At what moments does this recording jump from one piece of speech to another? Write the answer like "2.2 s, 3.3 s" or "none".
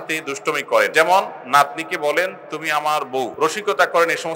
0.9 s, 3.3 s